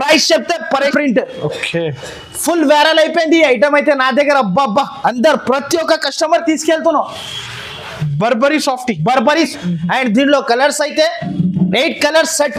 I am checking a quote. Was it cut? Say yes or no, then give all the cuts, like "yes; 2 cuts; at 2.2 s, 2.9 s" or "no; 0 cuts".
yes; 2 cuts; at 0.9 s, 9.5 s